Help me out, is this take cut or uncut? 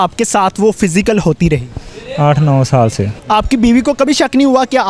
cut